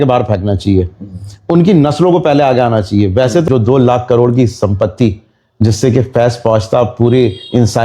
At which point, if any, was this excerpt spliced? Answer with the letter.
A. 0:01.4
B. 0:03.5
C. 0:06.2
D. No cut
B